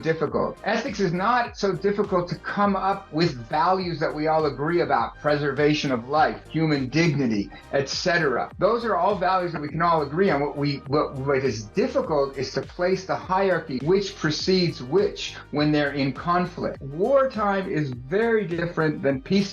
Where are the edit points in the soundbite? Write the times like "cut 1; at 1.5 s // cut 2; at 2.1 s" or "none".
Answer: cut 1; at 16.8 s // cut 2; at 18.6 s